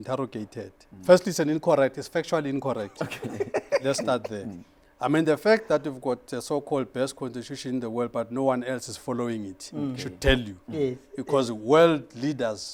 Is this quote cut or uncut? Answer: uncut